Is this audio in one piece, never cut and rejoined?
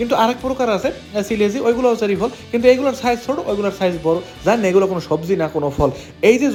yes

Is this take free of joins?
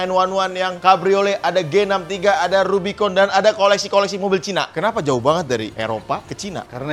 yes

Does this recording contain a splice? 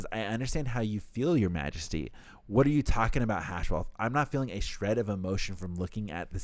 no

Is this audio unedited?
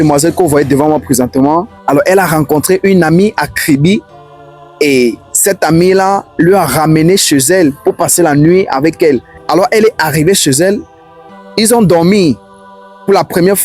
no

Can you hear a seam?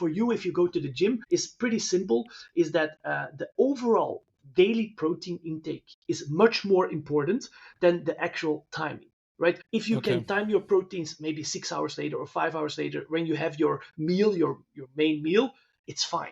yes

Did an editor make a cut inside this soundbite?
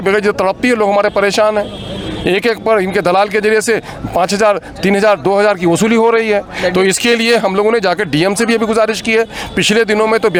no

